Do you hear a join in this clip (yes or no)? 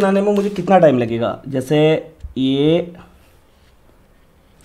no